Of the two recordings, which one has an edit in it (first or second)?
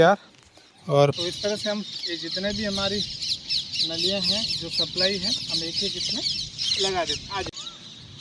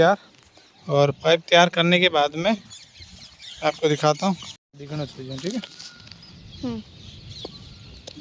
first